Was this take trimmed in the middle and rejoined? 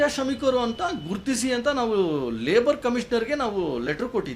no; 0 cuts

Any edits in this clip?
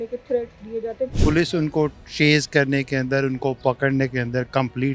yes; 1 cut; at 1.1 s

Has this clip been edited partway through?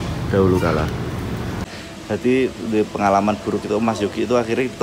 yes; 1 cut; at 1.7 s

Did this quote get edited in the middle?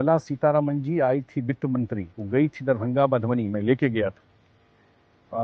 yes; 1 cut; at 2.1 s

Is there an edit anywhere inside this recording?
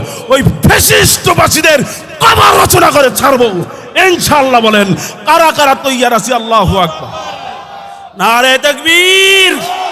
no; 0 cuts

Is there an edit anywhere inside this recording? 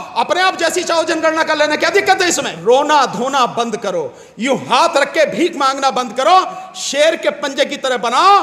yes; 1 cut; at 2.5 s

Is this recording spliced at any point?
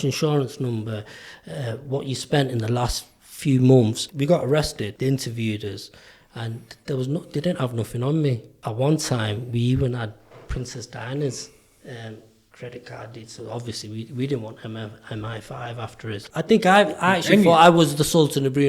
yes; 4 cuts; at 4.0 s, 4.9 s, 8.5 s, 16.2 s

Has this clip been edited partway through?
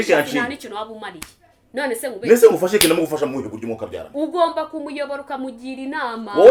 no; 0 cuts

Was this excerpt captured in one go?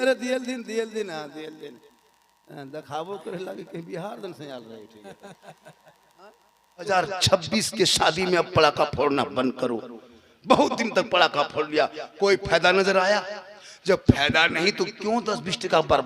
no; 1 cut; at 6.9 s

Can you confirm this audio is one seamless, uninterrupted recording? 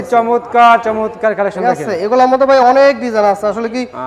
yes; 0 cuts

